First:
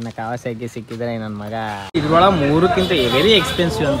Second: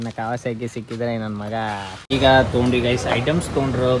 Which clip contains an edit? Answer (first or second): first